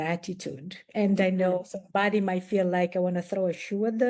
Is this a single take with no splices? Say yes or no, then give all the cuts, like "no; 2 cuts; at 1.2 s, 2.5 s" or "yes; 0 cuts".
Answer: yes; 0 cuts